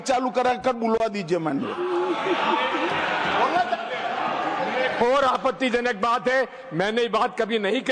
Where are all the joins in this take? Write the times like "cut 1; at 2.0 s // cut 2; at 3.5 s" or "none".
none